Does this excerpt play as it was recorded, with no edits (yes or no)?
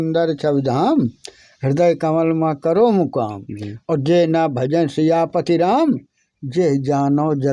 yes